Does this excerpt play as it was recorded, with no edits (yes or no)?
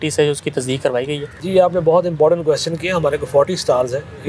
no